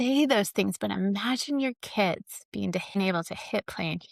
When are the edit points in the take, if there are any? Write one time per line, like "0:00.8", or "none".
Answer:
none